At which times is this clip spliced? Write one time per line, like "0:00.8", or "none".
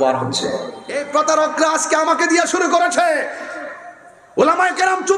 0:01.0